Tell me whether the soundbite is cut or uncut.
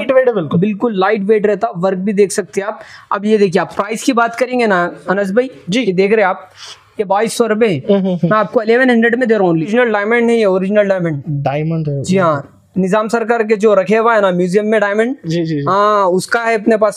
cut